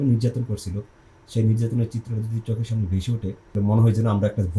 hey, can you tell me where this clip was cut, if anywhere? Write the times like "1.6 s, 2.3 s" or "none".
3.5 s